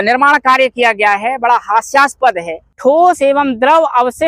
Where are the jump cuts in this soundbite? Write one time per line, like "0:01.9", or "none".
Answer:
0:02.6